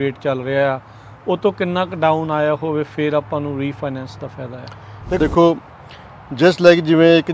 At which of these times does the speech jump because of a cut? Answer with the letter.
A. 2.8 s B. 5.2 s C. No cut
B